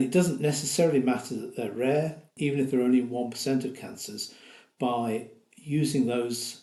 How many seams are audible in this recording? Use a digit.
0